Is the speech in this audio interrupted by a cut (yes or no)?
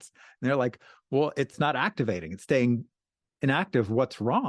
yes